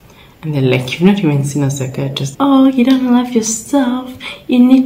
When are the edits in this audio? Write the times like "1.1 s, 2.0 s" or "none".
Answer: 2.3 s